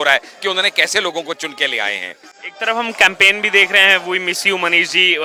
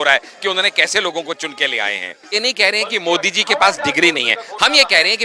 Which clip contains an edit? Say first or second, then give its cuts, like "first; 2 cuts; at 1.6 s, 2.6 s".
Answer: second; 1 cut; at 2.3 s